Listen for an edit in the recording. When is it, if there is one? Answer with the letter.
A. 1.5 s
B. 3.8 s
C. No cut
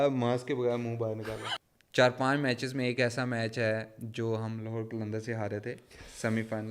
A